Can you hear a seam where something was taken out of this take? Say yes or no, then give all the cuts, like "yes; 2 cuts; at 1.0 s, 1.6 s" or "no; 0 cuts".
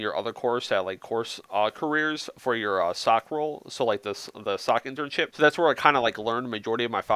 no; 0 cuts